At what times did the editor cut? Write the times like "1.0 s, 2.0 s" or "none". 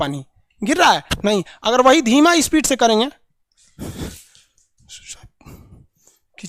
none